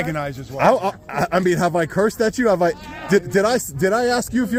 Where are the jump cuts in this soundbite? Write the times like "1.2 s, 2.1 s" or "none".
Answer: none